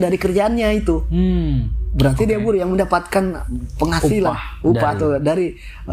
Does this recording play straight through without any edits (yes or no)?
yes